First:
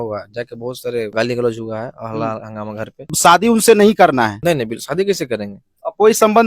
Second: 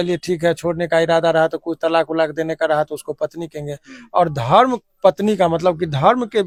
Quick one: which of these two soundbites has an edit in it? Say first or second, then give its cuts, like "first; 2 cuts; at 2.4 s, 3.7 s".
first; 3 cuts; at 1.1 s, 3.1 s, 4.4 s